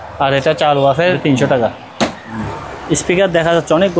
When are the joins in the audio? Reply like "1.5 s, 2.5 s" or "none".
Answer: 1.2 s, 2.4 s